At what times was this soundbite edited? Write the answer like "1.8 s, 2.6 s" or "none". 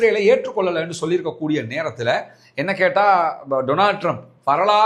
none